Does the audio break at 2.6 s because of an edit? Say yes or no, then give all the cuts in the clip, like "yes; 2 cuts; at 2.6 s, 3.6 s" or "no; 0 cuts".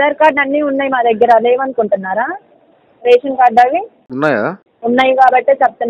no; 1 cut; at 4.6 s